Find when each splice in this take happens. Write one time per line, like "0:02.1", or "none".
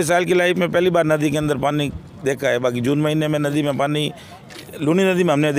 none